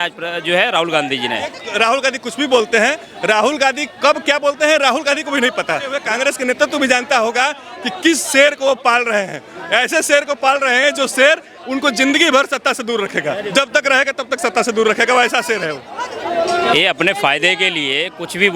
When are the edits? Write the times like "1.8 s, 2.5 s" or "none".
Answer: 1.6 s, 6.0 s, 16.0 s